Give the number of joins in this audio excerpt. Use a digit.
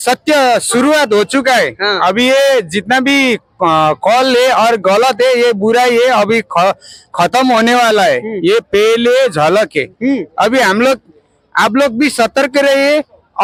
0